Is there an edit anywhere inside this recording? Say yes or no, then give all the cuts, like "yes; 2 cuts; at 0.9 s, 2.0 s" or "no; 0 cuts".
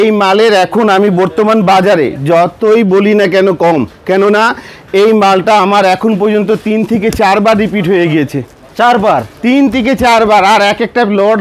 no; 0 cuts